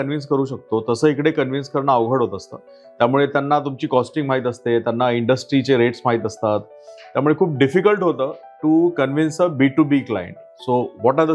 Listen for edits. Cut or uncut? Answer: uncut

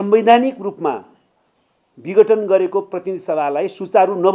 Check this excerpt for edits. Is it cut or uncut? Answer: uncut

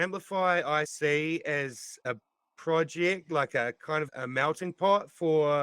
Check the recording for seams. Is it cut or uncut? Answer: cut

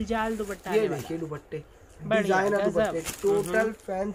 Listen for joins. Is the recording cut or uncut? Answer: uncut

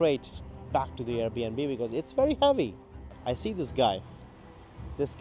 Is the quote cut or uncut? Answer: cut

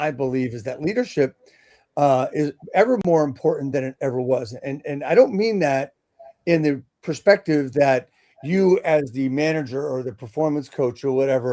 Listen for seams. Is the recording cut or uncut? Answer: uncut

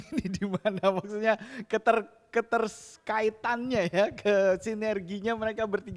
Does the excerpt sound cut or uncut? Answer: uncut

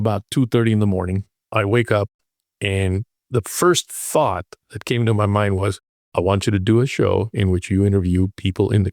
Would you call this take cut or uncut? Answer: cut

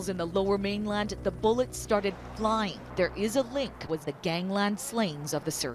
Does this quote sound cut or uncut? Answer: cut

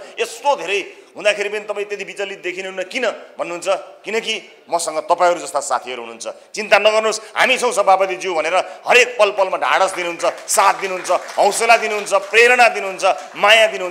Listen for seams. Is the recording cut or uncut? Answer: uncut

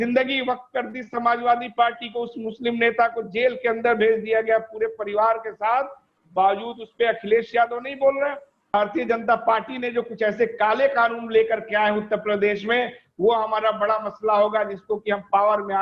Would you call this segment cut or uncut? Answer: cut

